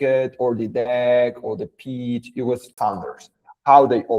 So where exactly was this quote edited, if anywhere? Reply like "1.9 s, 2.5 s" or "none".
2.7 s